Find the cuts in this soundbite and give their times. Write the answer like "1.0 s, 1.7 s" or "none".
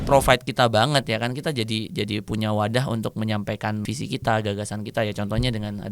3.9 s